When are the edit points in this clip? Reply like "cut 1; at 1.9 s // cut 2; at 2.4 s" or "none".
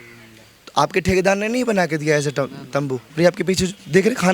cut 1; at 3.0 s